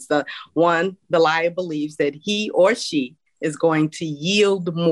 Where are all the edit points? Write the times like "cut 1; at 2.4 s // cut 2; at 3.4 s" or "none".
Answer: cut 1; at 3.2 s